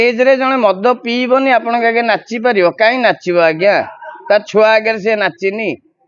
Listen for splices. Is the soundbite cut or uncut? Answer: uncut